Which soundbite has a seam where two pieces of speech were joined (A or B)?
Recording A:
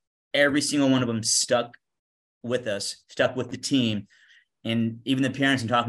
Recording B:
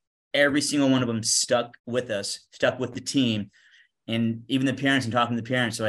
B